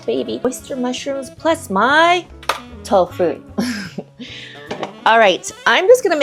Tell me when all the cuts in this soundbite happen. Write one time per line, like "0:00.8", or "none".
none